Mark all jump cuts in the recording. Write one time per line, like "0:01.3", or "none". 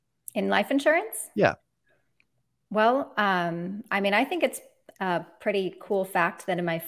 none